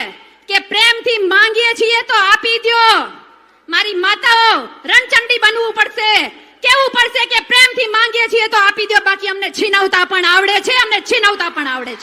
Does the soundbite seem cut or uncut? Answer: uncut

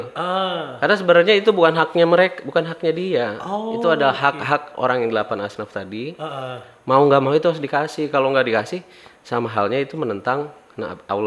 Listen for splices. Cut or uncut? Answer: uncut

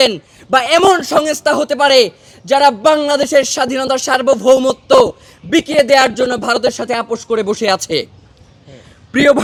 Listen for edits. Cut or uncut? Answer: uncut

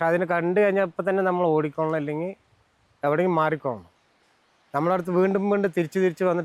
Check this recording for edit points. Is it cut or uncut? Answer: uncut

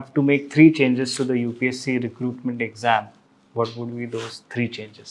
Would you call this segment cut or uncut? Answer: uncut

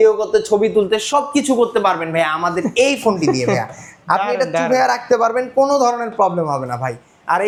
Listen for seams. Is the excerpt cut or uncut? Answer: uncut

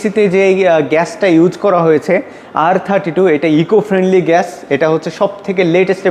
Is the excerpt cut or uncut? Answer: uncut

